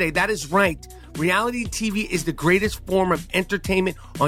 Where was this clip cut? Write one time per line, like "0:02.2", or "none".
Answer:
none